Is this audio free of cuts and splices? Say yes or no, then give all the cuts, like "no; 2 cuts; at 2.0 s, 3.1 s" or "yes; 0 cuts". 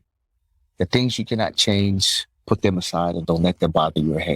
no; 1 cut; at 3.2 s